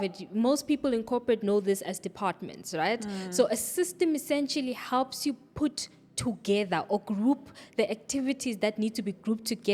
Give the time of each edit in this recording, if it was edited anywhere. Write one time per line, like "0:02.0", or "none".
none